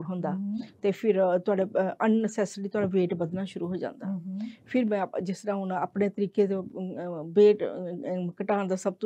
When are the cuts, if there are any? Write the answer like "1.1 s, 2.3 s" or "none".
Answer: none